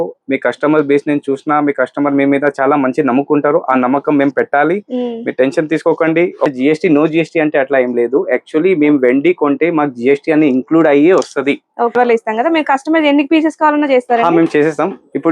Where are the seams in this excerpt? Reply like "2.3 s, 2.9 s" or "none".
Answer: 6.5 s, 11.9 s